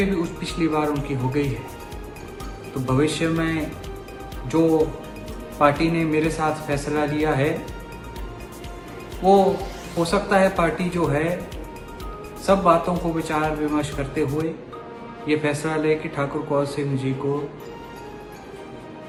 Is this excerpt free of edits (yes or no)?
yes